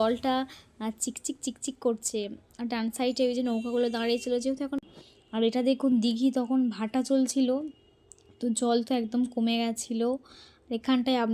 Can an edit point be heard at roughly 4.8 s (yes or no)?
yes